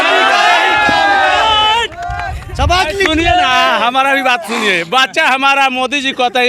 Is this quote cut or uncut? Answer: uncut